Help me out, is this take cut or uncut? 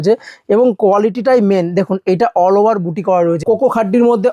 cut